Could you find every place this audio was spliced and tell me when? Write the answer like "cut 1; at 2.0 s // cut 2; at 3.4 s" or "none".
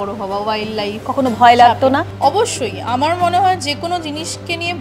cut 1; at 2.1 s